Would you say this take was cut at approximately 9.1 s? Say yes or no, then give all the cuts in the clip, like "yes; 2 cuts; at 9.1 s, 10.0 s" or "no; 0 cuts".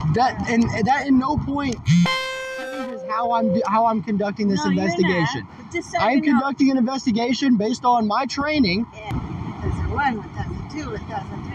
yes; 1 cut; at 9.1 s